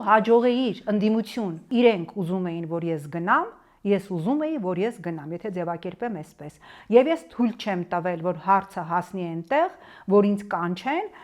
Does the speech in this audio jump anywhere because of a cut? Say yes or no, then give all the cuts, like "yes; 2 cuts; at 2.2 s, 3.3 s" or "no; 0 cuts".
yes; 1 cut; at 1.6 s